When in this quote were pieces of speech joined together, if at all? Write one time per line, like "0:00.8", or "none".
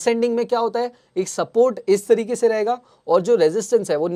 none